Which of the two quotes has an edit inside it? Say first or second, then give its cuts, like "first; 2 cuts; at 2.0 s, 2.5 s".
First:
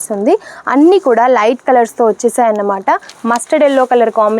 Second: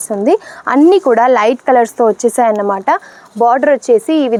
first; 1 cut; at 3.1 s